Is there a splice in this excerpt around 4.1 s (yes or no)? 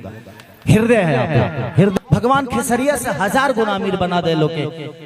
no